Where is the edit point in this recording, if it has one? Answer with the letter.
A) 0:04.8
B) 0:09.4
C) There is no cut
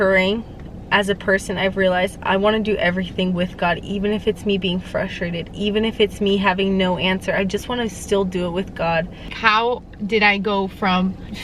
B